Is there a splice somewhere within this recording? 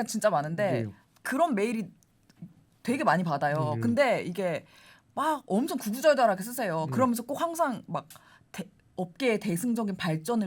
no; 0 cuts

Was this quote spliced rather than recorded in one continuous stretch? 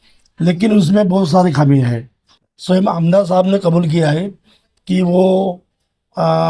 no; 0 cuts

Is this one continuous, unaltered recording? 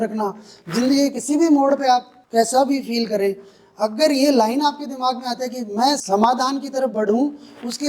no; 2 cuts; at 2.2 s, 6.0 s

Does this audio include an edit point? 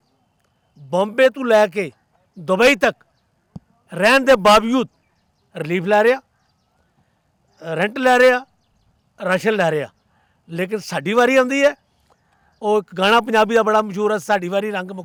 no; 0 cuts

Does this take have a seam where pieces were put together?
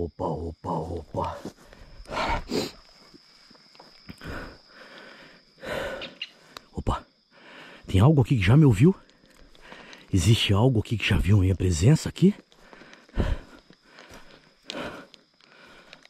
no; 0 cuts

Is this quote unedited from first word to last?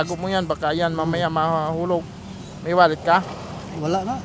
yes; 0 cuts

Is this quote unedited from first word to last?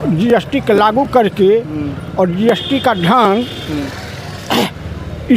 yes; 0 cuts

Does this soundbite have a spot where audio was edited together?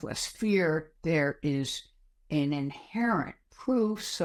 no; 0 cuts

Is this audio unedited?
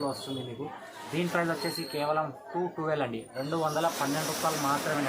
yes; 0 cuts

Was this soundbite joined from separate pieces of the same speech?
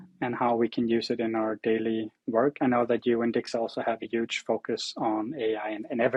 no; 0 cuts

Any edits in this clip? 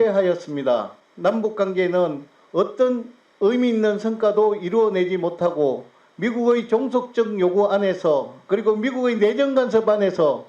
yes; 1 cut; at 1.0 s

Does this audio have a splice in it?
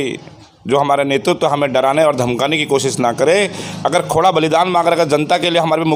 no; 0 cuts

